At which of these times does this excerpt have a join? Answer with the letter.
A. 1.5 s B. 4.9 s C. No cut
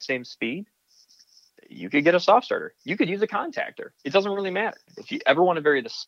B